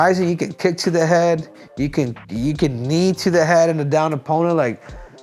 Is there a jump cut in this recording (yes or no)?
no